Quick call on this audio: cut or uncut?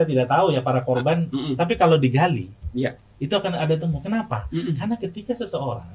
uncut